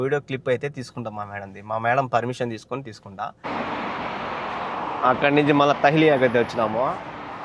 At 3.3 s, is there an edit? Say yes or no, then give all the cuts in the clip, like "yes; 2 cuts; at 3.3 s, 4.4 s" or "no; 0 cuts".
yes; 1 cut; at 3.3 s